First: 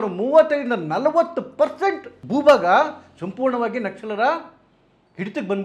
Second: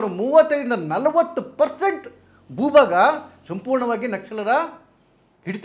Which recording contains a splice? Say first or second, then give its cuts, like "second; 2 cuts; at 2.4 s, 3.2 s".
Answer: first; 1 cut; at 2.1 s